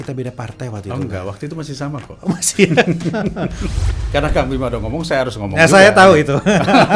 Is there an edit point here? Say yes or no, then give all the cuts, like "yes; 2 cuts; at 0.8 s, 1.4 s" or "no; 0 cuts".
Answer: yes; 1 cut; at 3.6 s